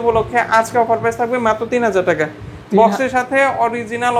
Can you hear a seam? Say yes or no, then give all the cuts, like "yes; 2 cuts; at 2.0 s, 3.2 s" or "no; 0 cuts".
no; 0 cuts